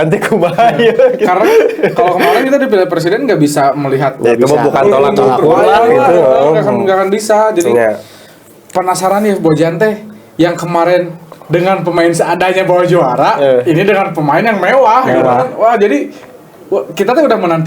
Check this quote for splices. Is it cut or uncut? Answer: uncut